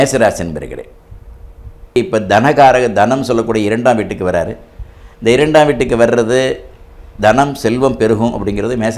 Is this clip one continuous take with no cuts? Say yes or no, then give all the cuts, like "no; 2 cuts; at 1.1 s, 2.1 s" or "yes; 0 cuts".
no; 1 cut; at 2.0 s